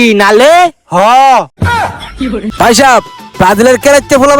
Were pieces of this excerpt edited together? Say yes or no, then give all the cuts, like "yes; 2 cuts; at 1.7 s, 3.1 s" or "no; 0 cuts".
yes; 1 cut; at 2.5 s